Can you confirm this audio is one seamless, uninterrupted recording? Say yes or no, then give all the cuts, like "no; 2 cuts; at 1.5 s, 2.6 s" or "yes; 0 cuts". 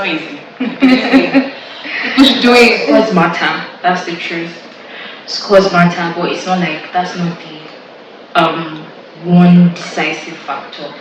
no; 1 cut; at 2.8 s